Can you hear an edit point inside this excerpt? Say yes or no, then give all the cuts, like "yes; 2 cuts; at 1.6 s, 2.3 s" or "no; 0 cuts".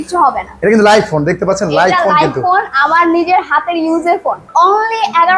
yes; 1 cut; at 4.4 s